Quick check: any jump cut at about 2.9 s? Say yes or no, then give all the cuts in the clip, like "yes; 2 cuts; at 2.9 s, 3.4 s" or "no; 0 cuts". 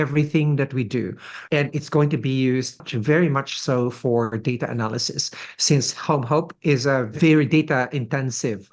yes; 3 cuts; at 1.3 s, 2.9 s, 7.1 s